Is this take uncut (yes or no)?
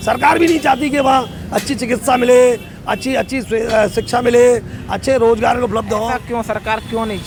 yes